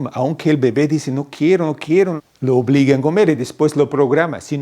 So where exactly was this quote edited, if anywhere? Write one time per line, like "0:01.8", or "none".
0:02.2